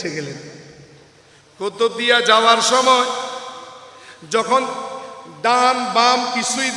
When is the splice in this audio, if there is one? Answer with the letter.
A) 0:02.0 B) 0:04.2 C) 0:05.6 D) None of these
D